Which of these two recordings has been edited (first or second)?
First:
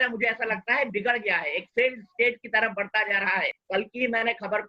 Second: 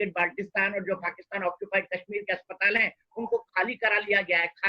first